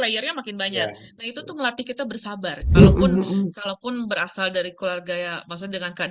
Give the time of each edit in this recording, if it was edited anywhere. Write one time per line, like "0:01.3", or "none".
0:02.7